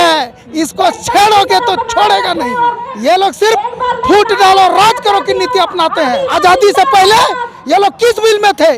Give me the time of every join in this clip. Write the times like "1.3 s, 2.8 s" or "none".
2.8 s, 6.3 s